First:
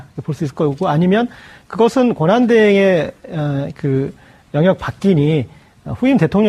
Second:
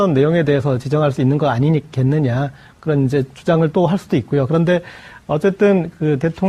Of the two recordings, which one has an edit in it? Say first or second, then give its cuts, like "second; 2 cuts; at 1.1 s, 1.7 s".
second; 1 cut; at 2.4 s